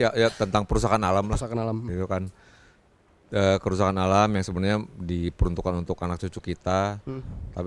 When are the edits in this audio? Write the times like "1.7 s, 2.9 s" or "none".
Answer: none